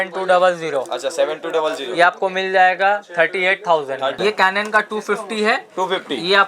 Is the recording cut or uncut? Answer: cut